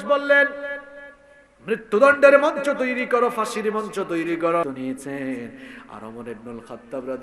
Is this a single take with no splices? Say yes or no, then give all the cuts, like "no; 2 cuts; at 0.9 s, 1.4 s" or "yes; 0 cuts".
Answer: no; 1 cut; at 4.6 s